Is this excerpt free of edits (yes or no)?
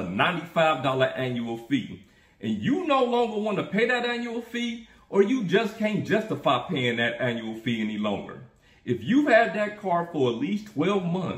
yes